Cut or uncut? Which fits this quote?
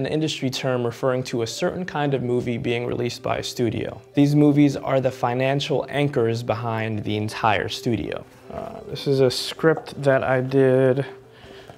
cut